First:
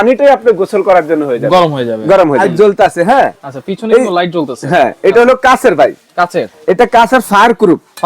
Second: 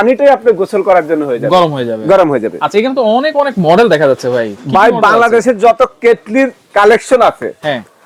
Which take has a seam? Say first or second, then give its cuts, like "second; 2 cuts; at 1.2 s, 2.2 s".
first; 1 cut; at 2.4 s